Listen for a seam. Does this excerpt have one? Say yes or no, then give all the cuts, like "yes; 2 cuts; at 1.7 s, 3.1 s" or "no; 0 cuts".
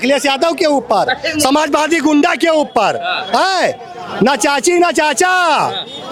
no; 0 cuts